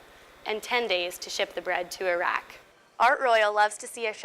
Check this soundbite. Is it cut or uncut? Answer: cut